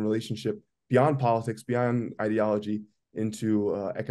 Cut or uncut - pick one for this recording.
uncut